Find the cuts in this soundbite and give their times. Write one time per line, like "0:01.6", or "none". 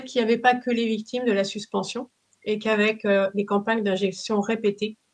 none